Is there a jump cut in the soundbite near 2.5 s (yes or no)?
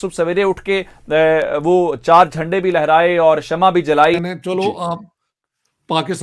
no